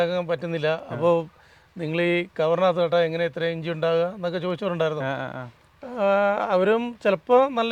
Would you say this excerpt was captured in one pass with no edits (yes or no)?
yes